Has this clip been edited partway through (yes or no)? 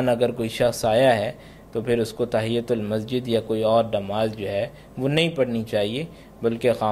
no